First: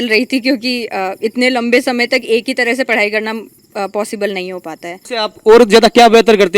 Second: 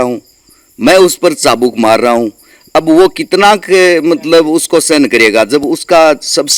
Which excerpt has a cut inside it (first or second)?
first